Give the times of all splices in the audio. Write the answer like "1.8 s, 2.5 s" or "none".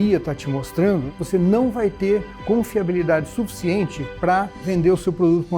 1.1 s, 4.6 s

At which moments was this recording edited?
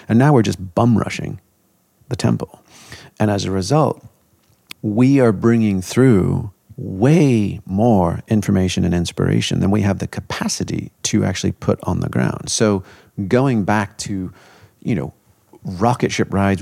12.4 s

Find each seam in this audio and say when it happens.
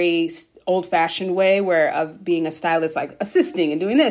none

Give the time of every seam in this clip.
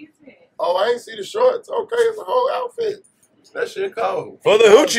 none

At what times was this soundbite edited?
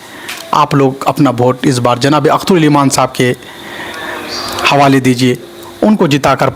none

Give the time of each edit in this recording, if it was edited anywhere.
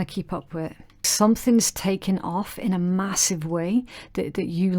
1.1 s

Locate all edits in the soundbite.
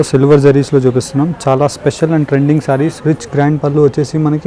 3.0 s

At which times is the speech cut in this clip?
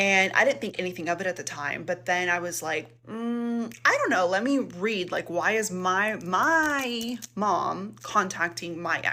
none

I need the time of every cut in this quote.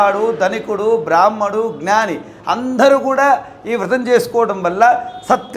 none

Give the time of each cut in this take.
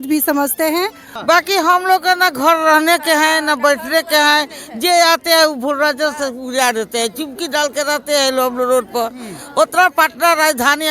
1.0 s

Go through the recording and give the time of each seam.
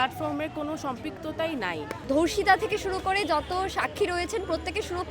2.0 s

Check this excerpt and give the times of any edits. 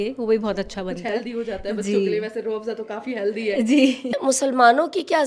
4.2 s

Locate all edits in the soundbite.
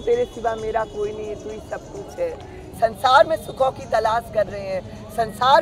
2.7 s

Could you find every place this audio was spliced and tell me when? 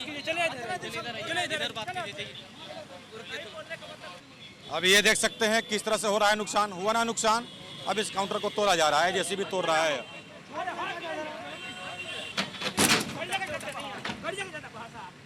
4.2 s, 12.3 s

